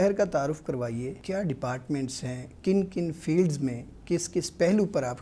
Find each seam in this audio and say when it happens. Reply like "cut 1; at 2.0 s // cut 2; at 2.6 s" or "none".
cut 1; at 1.2 s // cut 2; at 2.5 s